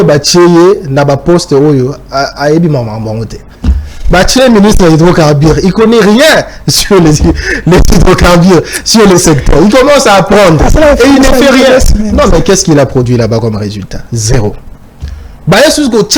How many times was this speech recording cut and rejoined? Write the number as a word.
zero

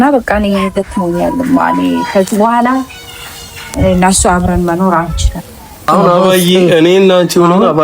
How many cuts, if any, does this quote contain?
one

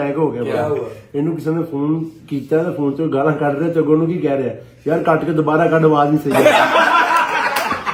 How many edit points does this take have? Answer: zero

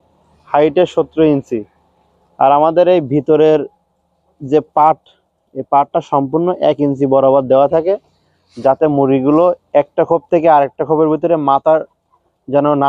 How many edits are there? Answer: zero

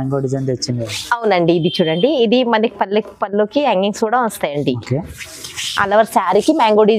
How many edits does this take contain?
zero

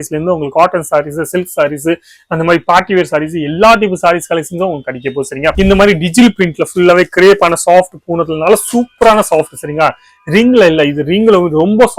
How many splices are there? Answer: one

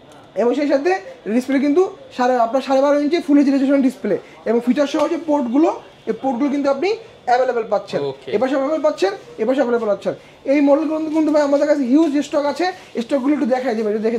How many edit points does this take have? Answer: zero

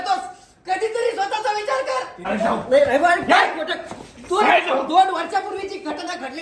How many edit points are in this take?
one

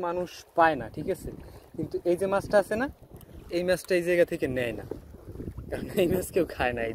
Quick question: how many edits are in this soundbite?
zero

